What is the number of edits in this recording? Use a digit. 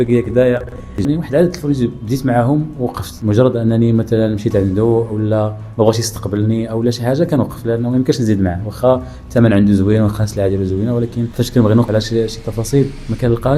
4